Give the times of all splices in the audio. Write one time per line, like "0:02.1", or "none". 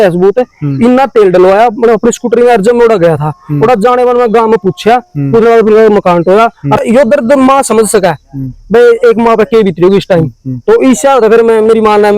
0:06.8